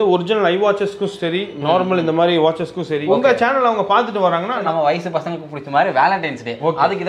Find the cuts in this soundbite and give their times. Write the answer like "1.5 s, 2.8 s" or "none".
3.0 s, 4.6 s